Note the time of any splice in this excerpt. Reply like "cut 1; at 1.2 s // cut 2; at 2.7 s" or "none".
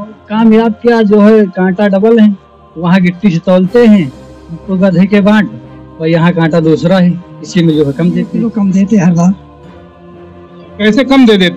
cut 1; at 8.3 s